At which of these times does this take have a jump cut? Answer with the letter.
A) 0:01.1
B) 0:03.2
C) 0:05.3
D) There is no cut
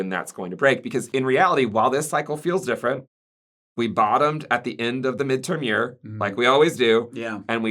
A